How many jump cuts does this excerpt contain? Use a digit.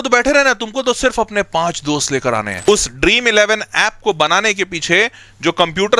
1